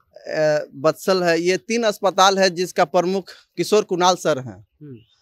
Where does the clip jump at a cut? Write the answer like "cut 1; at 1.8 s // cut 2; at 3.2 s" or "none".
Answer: none